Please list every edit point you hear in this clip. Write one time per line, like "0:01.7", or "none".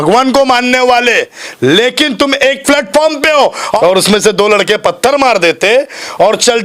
0:03.7